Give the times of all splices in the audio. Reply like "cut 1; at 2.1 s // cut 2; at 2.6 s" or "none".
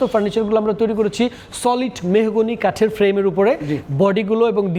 none